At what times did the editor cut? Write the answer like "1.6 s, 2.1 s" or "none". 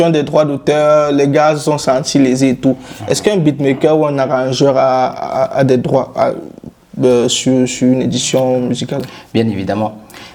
none